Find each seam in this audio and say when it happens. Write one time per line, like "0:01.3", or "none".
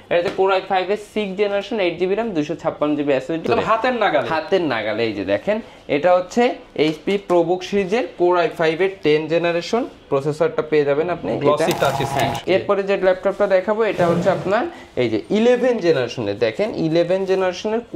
0:03.4
0:12.4